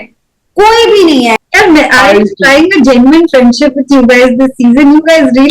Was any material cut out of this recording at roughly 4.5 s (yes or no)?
no